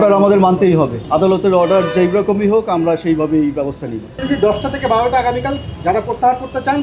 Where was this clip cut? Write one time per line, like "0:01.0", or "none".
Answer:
0:01.0
0:04.1